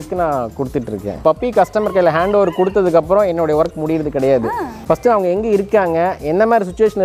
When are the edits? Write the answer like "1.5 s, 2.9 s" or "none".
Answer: 1.2 s, 4.7 s